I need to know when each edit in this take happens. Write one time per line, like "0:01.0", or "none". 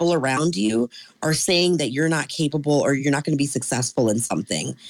0:03.0